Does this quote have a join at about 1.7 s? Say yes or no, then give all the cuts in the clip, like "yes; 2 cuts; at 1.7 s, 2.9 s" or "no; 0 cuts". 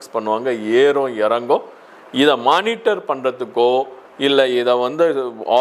no; 0 cuts